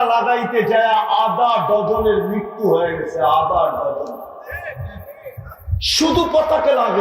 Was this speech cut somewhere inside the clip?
yes; 1 cut; at 5.9 s

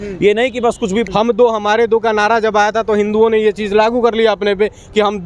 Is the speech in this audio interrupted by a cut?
yes; 1 cut; at 1.1 s

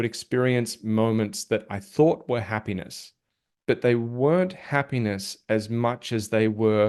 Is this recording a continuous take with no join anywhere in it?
yes; 0 cuts

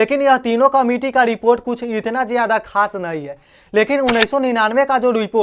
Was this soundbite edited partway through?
no; 0 cuts

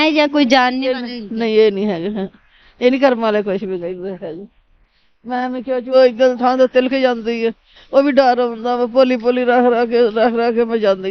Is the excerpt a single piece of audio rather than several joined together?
no; 1 cut; at 5.9 s

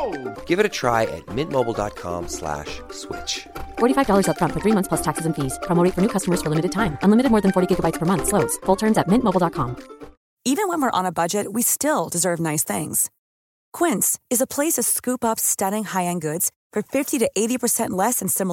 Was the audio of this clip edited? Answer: yes; 1 cut; at 10.3 s

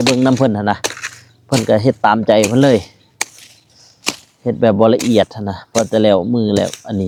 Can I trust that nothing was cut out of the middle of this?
yes; 0 cuts

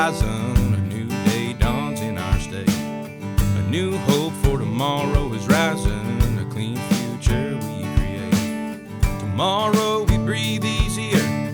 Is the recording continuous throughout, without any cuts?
yes; 0 cuts

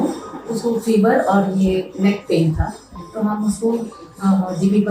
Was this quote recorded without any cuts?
yes; 0 cuts

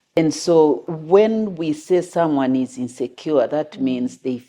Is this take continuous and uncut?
no; 1 cut; at 0.9 s

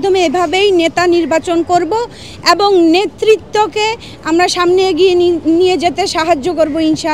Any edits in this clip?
no; 0 cuts

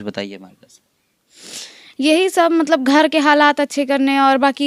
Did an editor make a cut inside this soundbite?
no; 0 cuts

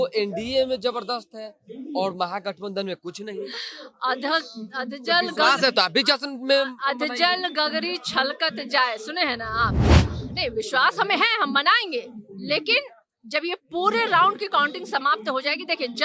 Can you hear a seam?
no; 0 cuts

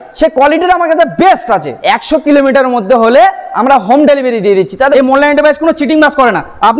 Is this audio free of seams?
no; 2 cuts; at 1.7 s, 4.9 s

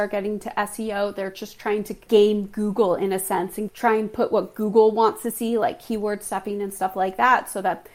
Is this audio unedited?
no; 2 cuts; at 2.0 s, 3.7 s

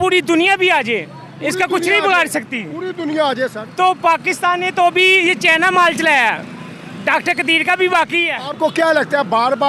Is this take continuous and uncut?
no; 1 cut; at 8.4 s

